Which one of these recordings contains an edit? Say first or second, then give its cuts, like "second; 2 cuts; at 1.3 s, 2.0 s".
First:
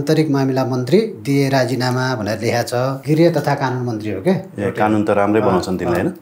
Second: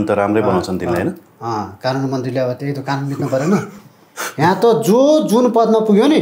first; 1 cut; at 3.0 s